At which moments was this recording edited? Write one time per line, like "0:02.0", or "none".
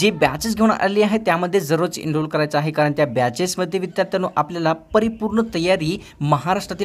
none